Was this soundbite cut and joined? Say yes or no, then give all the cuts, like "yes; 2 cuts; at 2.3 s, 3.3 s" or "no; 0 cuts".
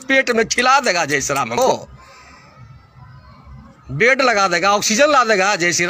no; 0 cuts